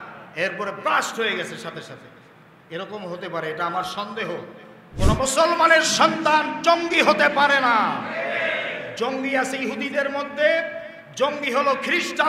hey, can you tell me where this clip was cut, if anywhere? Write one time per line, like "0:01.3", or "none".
0:04.9